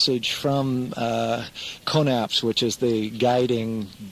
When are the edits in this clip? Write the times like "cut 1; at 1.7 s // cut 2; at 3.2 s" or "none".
cut 1; at 1.0 s